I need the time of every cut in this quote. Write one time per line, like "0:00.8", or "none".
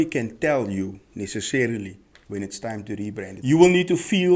0:03.3

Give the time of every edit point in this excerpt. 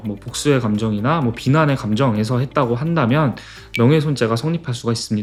none

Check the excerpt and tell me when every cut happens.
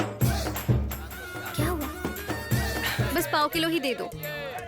0:01.0
0:03.0

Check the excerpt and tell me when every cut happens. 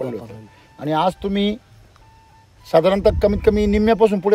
none

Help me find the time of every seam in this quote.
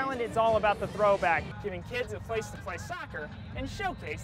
0:01.5

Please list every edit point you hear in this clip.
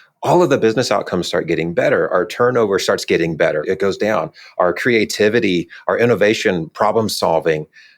0:02.1
0:03.6

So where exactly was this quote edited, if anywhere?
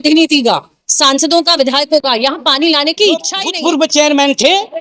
0:03.4

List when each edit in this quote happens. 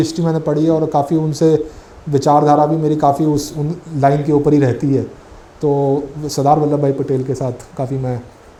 none

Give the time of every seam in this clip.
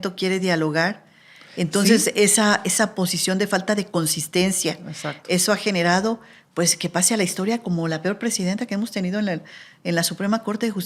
none

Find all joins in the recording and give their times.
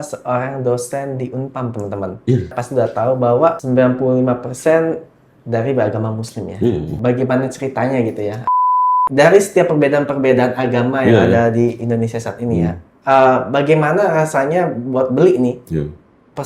0:02.6
0:03.6
0:06.9
0:08.8

